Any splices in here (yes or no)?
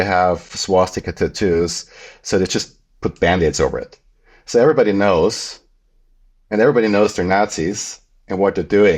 no